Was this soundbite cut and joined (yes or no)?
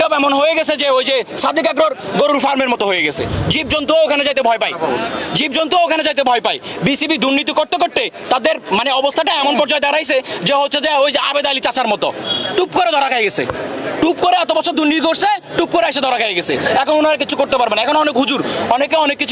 no